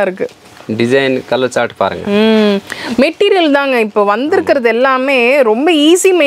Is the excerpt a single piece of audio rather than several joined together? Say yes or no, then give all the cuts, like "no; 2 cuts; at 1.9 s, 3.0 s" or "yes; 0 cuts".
yes; 0 cuts